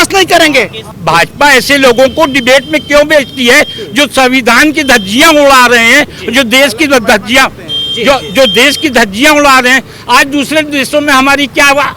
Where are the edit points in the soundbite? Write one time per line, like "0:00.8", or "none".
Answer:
0:01.0